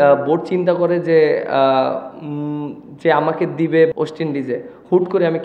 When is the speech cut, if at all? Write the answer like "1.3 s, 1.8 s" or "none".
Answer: 3.9 s

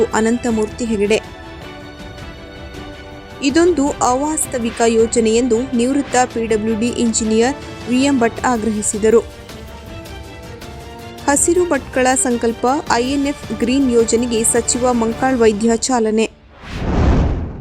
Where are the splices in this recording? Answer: 16.7 s

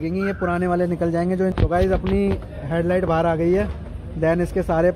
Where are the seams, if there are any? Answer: 1.5 s

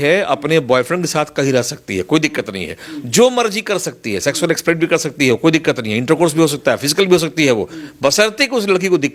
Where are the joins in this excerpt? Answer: none

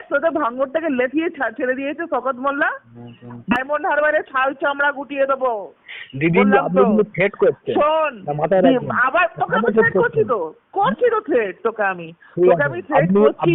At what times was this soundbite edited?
3.6 s

